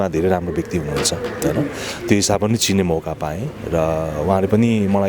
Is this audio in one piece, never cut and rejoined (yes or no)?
yes